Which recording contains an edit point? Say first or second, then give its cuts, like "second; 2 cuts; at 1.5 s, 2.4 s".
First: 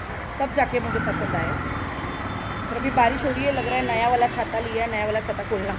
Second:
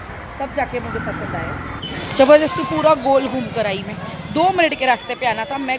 second; 1 cut; at 1.7 s